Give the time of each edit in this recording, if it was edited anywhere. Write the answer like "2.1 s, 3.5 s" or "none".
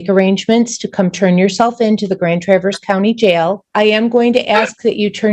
3.7 s